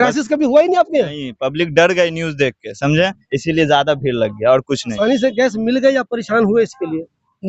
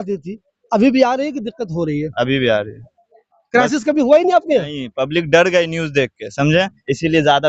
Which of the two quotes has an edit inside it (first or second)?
first